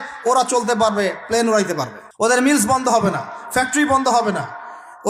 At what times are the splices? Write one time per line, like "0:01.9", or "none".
0:02.3